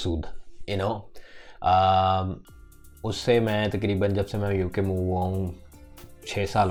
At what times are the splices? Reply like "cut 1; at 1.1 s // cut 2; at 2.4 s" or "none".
none